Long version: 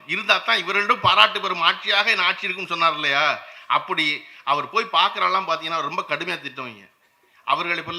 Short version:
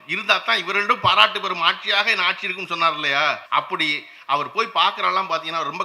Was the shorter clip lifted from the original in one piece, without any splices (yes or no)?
no